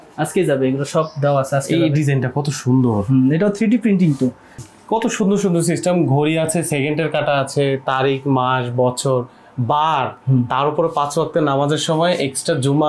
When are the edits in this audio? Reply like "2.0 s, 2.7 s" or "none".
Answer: 4.6 s